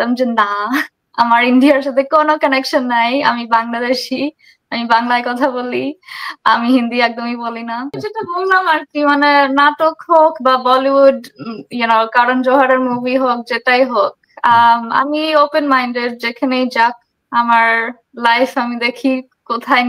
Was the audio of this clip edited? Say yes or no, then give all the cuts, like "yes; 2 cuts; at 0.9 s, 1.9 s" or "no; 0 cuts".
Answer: yes; 1 cut; at 8.0 s